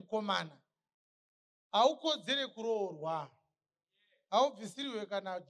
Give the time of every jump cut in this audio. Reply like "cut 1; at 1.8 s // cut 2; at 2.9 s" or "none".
none